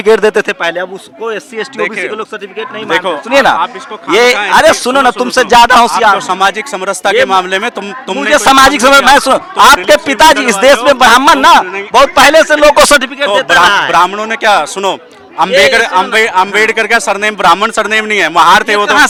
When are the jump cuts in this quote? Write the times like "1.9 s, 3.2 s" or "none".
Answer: none